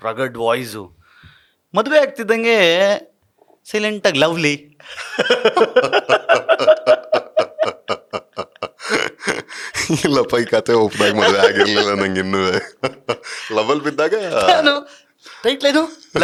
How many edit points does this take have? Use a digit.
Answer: 0